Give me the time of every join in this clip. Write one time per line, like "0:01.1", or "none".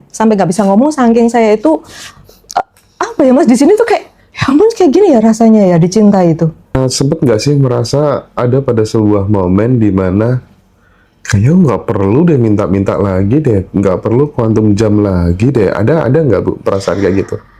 0:06.8

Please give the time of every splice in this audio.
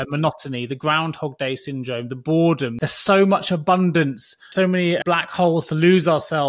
0:02.7
0:04.7

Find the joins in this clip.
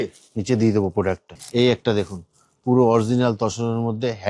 0:01.3

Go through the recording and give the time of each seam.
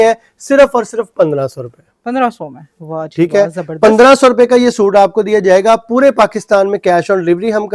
none

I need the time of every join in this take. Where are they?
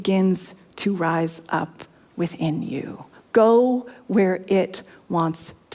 none

